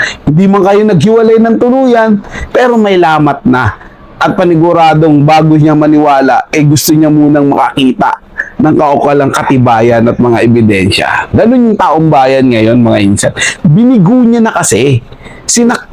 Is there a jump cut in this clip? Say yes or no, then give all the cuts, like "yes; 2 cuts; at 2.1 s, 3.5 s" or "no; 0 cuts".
no; 0 cuts